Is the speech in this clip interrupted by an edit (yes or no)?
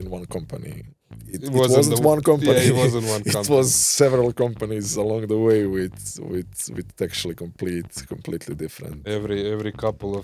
no